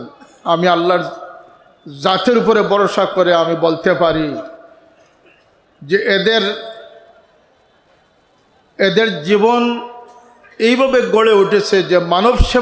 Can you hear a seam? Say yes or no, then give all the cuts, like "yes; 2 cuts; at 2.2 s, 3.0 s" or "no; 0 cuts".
no; 0 cuts